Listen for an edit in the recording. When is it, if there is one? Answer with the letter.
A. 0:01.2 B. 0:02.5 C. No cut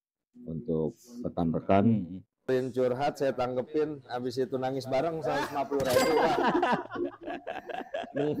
B